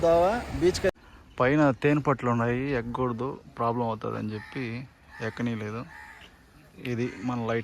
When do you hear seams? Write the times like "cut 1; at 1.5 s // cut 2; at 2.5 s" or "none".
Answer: cut 1; at 0.9 s